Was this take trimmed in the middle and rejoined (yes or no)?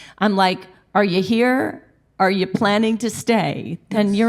no